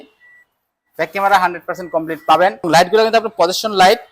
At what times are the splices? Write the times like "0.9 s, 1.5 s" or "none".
2.7 s